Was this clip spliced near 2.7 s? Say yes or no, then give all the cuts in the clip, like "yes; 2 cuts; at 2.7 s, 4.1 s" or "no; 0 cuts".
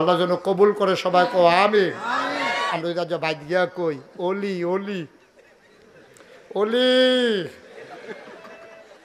yes; 1 cut; at 2.7 s